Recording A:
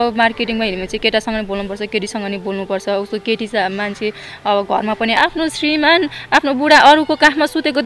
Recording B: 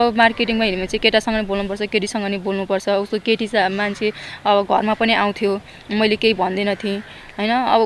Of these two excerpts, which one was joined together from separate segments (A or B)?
A